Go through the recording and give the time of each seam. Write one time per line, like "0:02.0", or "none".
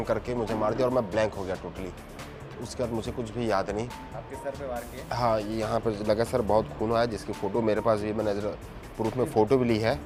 none